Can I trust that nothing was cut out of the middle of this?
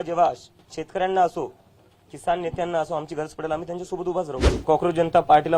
no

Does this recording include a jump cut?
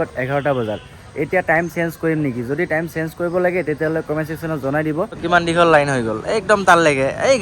yes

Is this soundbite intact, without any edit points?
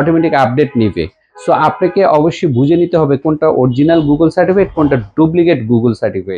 yes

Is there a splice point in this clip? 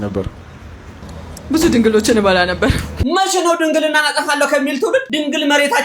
yes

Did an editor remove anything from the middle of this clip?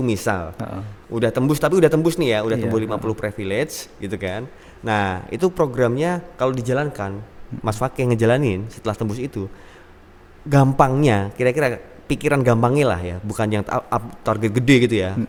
no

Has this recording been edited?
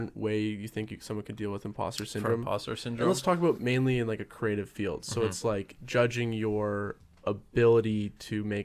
no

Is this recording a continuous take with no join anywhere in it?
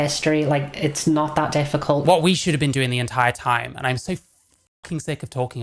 no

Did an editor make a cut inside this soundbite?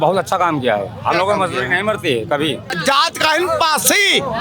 yes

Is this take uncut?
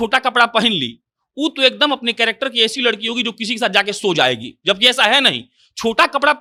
yes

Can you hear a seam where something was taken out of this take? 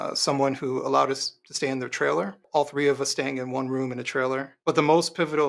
yes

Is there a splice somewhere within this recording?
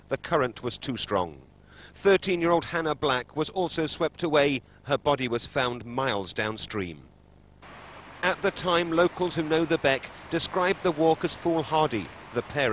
no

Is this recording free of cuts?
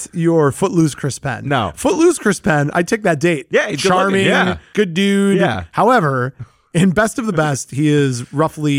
no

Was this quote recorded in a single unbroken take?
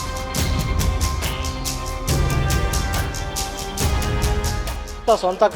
yes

